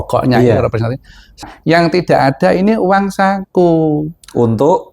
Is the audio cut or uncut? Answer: cut